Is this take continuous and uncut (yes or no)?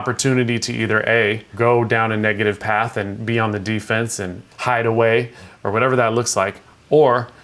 no